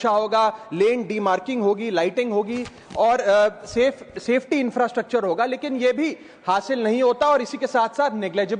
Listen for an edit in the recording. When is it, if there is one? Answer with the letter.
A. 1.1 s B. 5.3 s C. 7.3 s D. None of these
D